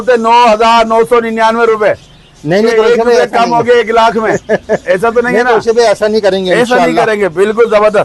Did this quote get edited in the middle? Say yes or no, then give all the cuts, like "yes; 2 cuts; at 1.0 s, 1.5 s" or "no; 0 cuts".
no; 0 cuts